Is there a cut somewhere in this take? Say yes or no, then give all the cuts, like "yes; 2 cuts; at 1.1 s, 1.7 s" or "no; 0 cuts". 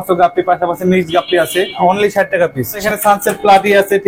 yes; 2 cuts; at 1.7 s, 2.8 s